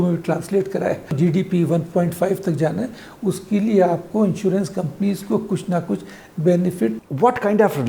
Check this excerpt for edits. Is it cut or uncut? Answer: cut